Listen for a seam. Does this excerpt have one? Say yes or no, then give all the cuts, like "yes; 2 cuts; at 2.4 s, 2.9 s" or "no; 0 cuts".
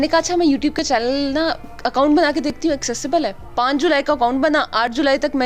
yes; 1 cut; at 3.4 s